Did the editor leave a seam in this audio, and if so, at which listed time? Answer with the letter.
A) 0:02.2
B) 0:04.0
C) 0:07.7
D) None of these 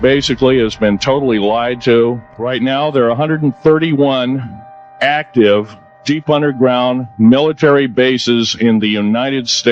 A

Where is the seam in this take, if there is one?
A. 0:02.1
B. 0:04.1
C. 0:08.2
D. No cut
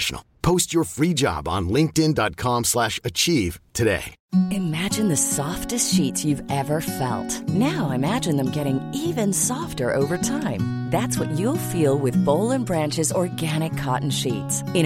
B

